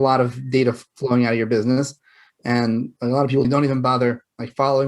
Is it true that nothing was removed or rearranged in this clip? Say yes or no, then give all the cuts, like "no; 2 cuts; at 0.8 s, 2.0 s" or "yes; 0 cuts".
no; 1 cut; at 3.5 s